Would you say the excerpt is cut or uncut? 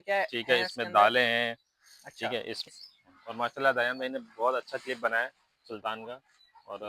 cut